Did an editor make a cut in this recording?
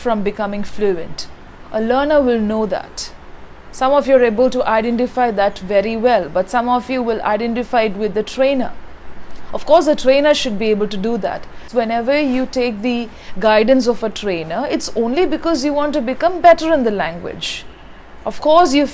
no; 0 cuts

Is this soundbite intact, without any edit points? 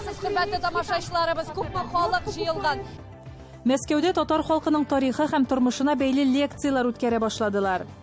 no; 1 cut; at 2.9 s

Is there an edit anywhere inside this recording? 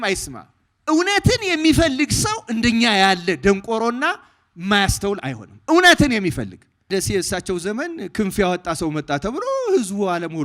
yes; 1 cut; at 6.9 s

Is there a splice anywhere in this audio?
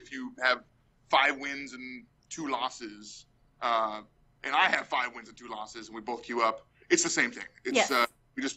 yes; 1 cut; at 6.2 s

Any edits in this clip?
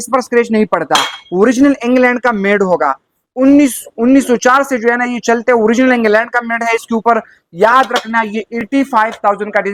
no; 0 cuts

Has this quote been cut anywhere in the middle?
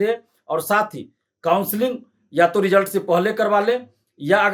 no; 0 cuts

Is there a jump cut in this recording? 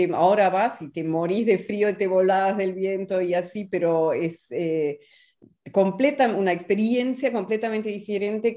no; 0 cuts

